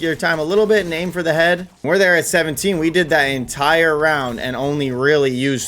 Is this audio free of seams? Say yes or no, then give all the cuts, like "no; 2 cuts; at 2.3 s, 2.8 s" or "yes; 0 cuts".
no; 1 cut; at 1.7 s